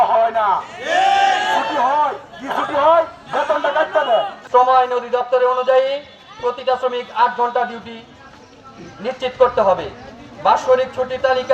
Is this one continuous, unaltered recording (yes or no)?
no